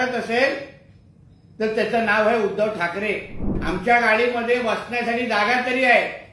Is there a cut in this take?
yes; 1 cut; at 3.5 s

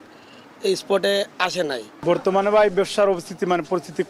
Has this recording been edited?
no; 0 cuts

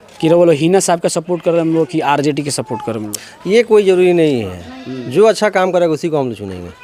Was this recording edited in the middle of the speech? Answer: no; 0 cuts

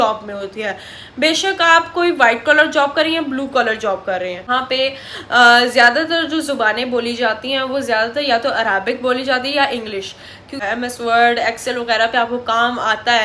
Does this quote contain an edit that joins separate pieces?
yes; 2 cuts; at 4.5 s, 10.6 s

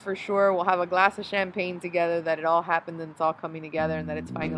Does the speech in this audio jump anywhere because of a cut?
no; 0 cuts

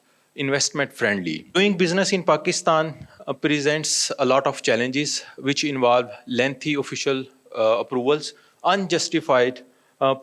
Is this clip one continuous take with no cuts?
no; 1 cut; at 1.6 s

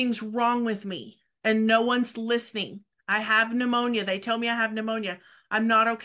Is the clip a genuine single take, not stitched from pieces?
yes; 0 cuts

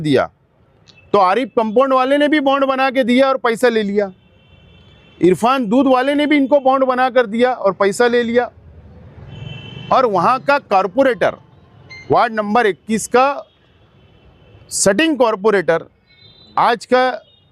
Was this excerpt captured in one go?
yes; 0 cuts

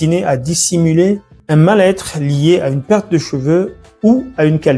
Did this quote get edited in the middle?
yes; 1 cut; at 1.3 s

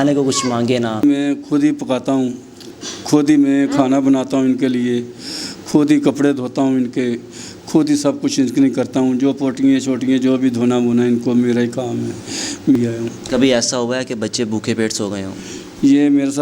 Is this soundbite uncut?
no; 2 cuts; at 1.0 s, 12.8 s

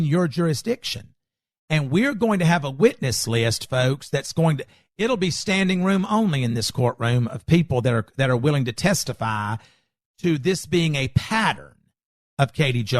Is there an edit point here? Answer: no; 0 cuts

